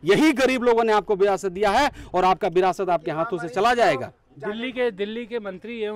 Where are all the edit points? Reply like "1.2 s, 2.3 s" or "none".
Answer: none